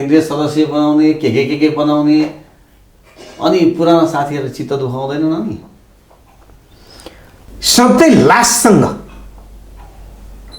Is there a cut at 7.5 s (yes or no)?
yes